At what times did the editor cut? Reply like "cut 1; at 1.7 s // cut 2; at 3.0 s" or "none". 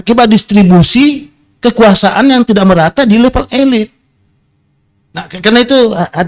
none